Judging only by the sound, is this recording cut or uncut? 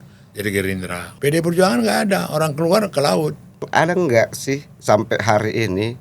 cut